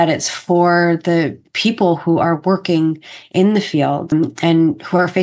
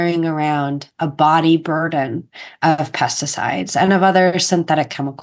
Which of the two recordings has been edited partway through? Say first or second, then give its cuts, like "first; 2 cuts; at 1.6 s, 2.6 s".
first; 2 cuts; at 1.5 s, 4.1 s